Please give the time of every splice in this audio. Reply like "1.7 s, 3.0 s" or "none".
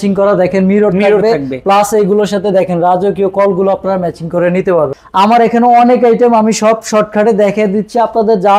4.9 s